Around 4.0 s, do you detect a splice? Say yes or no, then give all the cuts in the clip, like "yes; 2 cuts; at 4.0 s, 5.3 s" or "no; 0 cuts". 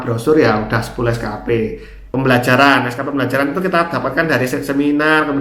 no; 1 cut; at 2.0 s